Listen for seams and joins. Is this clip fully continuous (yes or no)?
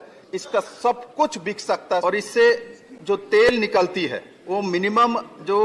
no